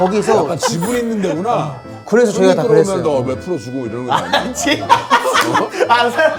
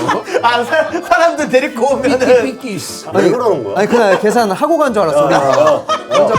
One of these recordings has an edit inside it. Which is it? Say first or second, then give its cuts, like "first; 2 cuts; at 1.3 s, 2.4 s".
second; 1 cut; at 2.9 s